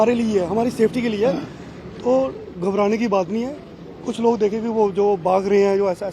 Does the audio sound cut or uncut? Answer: uncut